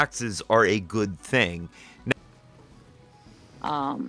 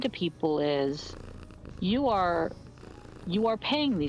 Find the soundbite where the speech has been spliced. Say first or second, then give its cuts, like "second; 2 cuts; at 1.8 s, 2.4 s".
first; 1 cut; at 2.1 s